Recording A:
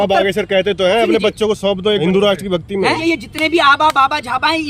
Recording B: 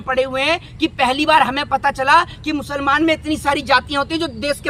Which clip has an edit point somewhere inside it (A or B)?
A